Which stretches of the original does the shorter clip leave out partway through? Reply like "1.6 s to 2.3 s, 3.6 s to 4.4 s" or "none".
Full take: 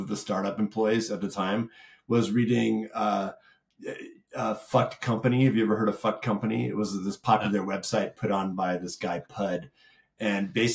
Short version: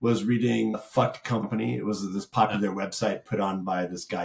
3.3 s to 6.1 s